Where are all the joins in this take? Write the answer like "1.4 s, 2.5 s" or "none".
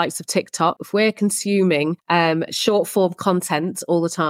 0.8 s, 2.0 s